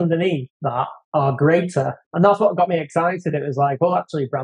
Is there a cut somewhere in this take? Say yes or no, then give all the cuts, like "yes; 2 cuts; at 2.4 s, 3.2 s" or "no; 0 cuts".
yes; 2 cuts; at 1.0 s, 2.0 s